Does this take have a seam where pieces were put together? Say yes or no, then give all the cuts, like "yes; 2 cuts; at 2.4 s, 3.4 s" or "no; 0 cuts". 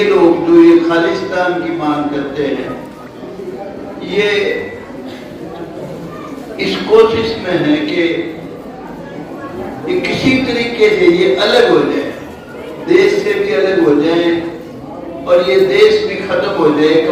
no; 0 cuts